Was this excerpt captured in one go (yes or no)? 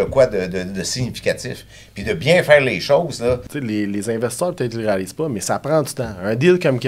no